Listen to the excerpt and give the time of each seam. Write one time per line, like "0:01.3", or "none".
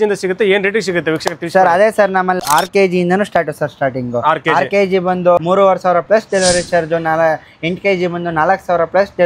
0:02.4
0:05.4

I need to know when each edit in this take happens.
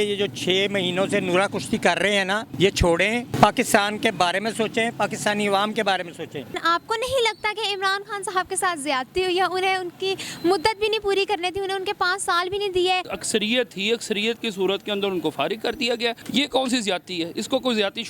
0:02.5
0:03.3
0:06.6
0:13.1
0:16.2

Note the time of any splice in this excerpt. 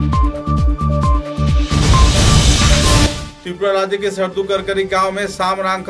0:03.0

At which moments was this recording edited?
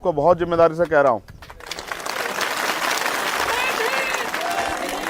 none

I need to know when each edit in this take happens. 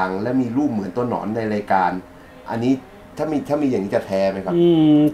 none

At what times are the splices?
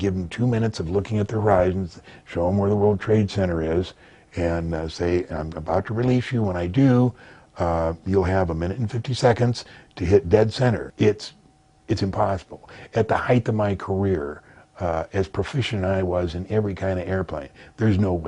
0:10.9

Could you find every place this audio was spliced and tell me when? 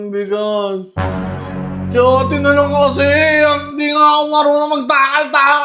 none

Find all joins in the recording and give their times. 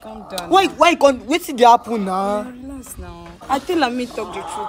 0:03.5

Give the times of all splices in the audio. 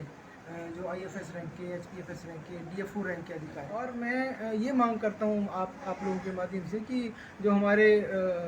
0:03.8

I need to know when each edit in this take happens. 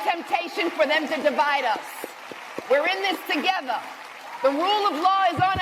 none

